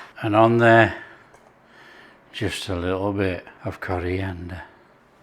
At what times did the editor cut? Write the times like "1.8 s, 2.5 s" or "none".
3.5 s